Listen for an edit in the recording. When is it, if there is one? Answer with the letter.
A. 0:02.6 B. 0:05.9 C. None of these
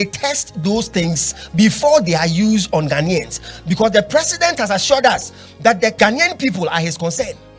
B